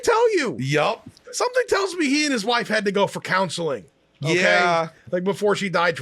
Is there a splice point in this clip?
yes; 1 cut; at 1.4 s

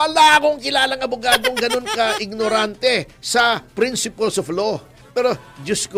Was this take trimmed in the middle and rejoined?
yes; 1 cut; at 5.0 s

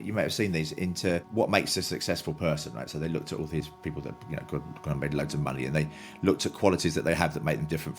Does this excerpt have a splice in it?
yes; 1 cut; at 1.3 s

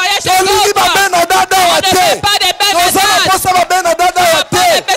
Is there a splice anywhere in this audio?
no; 0 cuts

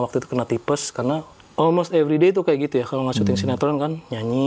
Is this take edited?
yes; 1 cut; at 1.4 s

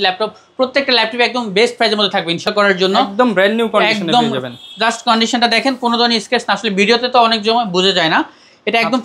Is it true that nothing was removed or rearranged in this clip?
no; 1 cut; at 2.5 s

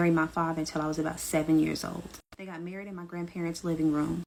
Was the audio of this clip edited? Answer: no; 0 cuts

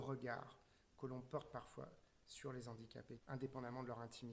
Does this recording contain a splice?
yes; 1 cut; at 3.2 s

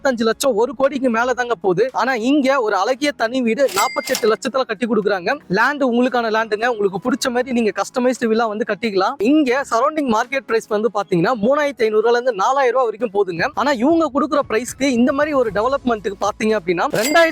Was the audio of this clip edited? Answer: yes; 1 cut; at 9.2 s

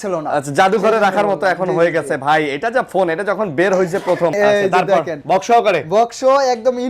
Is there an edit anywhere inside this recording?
yes; 1 cut; at 4.3 s

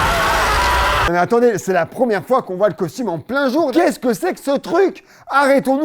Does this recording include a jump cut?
yes; 2 cuts; at 1.1 s, 3.7 s

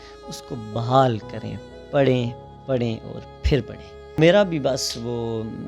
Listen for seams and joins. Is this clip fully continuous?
no; 1 cut; at 4.2 s

